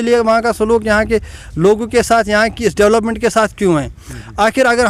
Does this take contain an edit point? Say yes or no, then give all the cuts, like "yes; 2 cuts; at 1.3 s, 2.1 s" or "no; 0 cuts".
no; 0 cuts